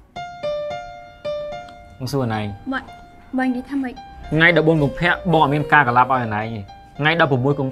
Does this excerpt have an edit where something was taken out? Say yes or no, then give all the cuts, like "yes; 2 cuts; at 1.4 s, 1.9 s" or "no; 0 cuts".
no; 0 cuts